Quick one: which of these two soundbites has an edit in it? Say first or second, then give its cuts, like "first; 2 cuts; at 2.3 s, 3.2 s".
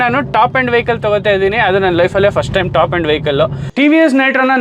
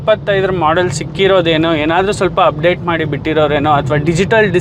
first; 1 cut; at 3.6 s